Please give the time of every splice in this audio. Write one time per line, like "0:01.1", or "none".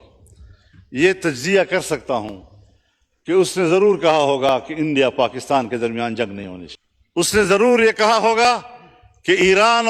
none

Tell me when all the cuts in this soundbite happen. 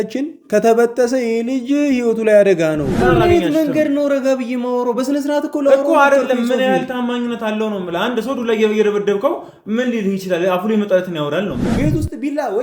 0:03.0
0:11.7

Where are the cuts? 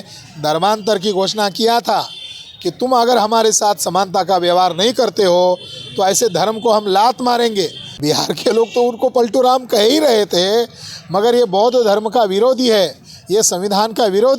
0:07.8

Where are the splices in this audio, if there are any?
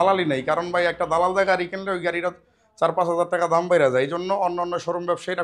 none

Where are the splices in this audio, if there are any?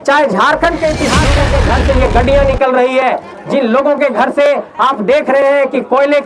0:01.4

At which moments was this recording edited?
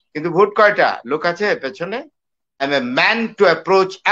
0:02.6

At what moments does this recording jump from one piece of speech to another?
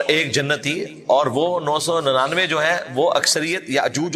none

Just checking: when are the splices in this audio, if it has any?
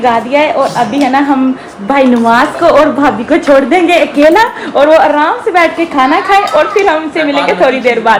none

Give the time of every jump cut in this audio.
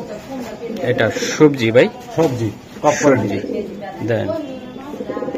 none

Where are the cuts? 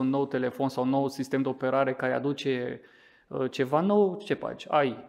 none

